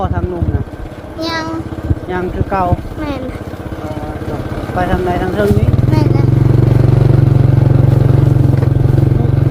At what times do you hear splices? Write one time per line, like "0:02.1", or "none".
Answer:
none